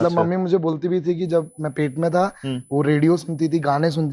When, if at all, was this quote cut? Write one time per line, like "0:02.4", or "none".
none